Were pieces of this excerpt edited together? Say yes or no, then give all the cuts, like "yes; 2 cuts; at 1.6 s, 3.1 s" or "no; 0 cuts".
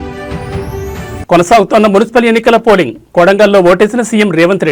no; 0 cuts